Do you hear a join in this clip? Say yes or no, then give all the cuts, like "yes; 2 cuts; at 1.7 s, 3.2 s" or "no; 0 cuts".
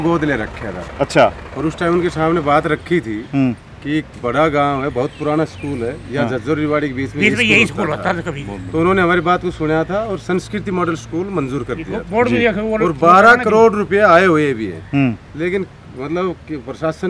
no; 0 cuts